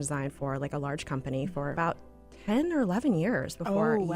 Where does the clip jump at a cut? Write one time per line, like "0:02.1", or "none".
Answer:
0:01.7